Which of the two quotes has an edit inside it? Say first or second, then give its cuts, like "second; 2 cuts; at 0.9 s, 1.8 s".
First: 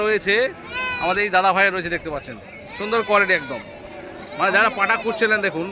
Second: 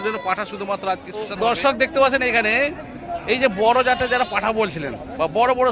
second; 1 cut; at 1.3 s